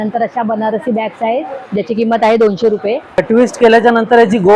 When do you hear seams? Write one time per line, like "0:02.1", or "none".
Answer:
0:03.1